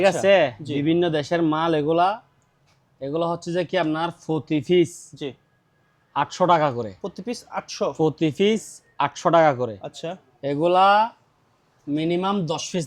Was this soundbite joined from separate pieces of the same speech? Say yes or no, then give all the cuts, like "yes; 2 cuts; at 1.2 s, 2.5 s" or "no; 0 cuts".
no; 0 cuts